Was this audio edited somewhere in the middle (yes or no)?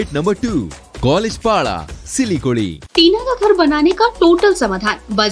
yes